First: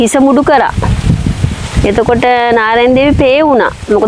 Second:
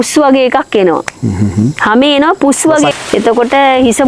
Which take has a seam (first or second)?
second